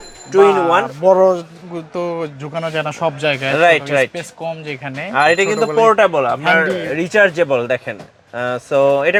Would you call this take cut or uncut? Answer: uncut